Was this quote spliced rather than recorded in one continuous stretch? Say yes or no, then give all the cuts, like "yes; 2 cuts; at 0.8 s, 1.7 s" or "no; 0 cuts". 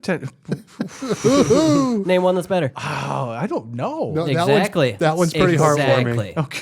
no; 0 cuts